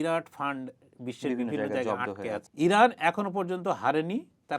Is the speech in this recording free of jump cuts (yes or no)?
no